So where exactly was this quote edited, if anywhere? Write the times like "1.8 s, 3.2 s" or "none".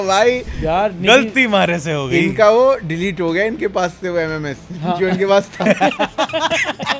none